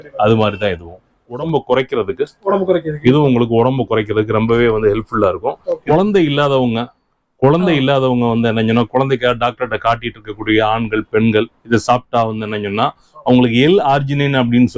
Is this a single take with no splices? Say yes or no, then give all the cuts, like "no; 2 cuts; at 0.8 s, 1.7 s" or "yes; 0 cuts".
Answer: no; 2 cuts; at 1.4 s, 5.7 s